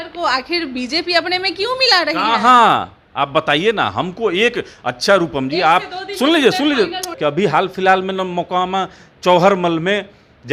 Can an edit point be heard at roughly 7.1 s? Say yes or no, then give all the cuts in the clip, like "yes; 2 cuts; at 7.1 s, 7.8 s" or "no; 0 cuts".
yes; 1 cut; at 7.1 s